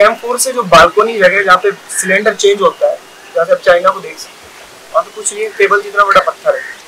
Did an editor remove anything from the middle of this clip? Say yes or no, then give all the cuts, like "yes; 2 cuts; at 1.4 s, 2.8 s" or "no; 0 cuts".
no; 0 cuts